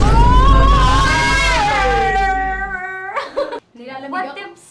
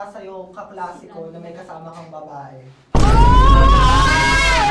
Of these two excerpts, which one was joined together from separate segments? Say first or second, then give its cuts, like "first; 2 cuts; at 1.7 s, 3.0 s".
first; 1 cut; at 3.8 s